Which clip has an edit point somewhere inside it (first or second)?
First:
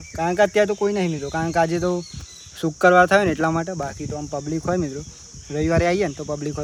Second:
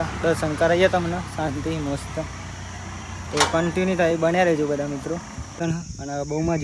second